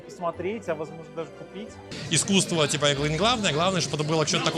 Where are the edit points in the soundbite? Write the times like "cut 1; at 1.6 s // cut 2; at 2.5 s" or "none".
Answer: cut 1; at 1.9 s